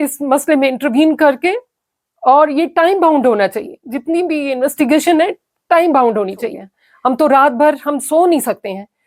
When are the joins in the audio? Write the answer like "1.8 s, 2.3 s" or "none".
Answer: 6.9 s